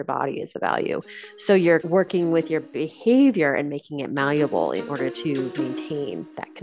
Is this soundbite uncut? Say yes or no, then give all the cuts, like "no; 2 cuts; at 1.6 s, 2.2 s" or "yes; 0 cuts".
no; 2 cuts; at 1.8 s, 5.5 s